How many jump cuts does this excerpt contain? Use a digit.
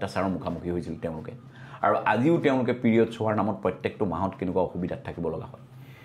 0